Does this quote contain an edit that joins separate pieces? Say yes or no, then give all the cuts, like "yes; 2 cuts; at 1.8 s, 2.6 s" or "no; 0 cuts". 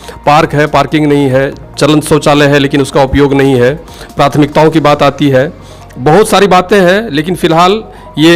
no; 0 cuts